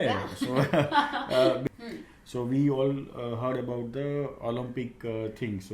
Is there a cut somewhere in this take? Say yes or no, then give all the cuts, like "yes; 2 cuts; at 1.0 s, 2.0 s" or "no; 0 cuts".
yes; 1 cut; at 1.6 s